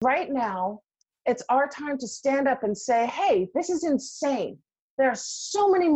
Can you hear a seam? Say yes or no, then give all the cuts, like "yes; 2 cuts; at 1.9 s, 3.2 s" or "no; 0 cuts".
no; 0 cuts